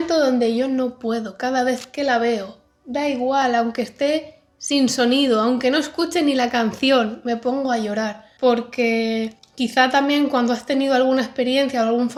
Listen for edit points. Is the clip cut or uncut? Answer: uncut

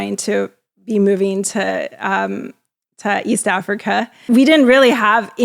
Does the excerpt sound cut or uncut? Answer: cut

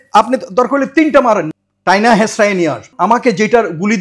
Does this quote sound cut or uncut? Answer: cut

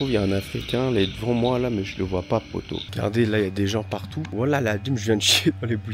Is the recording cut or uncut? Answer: cut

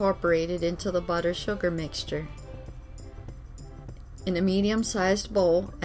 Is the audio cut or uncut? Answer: cut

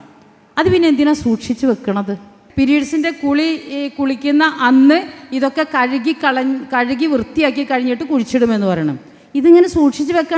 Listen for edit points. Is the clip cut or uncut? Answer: cut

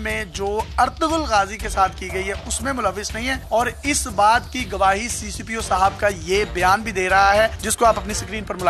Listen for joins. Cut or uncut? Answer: cut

